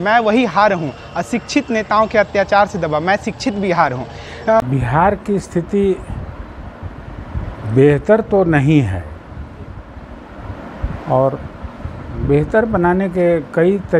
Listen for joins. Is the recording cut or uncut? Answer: cut